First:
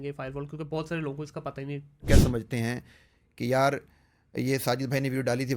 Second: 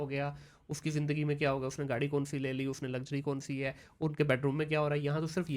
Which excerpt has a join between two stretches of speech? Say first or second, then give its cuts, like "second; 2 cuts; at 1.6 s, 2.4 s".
first; 1 cut; at 2.0 s